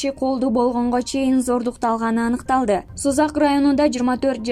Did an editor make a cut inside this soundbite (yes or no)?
yes